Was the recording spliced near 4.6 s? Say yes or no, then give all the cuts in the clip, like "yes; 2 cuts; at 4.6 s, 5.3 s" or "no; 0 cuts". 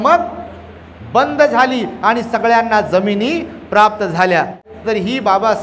yes; 1 cut; at 4.6 s